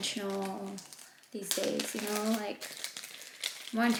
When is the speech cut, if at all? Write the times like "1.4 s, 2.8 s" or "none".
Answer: none